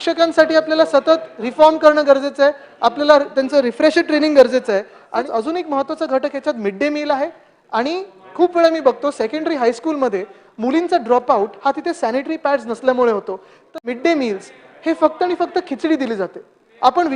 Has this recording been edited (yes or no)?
yes